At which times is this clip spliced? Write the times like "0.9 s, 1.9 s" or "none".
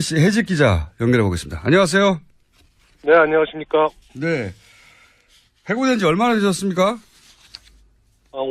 3.6 s